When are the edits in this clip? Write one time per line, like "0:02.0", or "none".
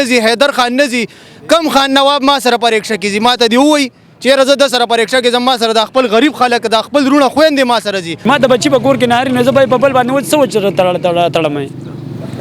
0:08.1